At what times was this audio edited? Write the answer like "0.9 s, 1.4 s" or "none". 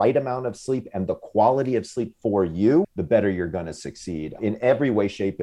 2.9 s, 4.4 s